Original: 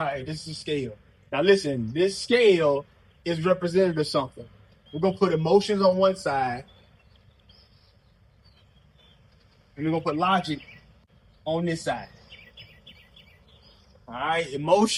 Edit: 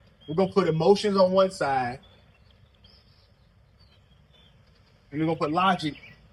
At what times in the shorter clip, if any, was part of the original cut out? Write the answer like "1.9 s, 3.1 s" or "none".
none